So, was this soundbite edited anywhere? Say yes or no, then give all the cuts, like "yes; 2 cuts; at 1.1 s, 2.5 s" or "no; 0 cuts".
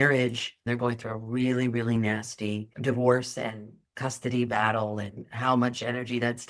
yes; 1 cut; at 2.7 s